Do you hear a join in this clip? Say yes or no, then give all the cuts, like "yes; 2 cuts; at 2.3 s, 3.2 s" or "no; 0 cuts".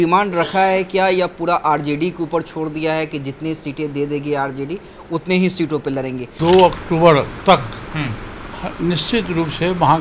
yes; 1 cut; at 6.3 s